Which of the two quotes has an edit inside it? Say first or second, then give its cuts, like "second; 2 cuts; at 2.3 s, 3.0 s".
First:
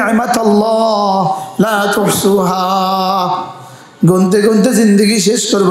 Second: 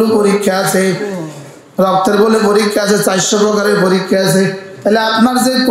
second; 1 cut; at 4.7 s